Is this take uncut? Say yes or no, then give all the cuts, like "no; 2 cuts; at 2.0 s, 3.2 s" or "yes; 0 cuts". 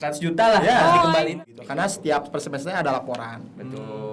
no; 1 cut; at 1.3 s